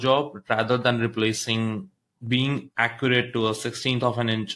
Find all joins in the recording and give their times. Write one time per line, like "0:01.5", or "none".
0:02.1